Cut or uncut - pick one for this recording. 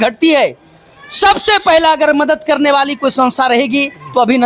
uncut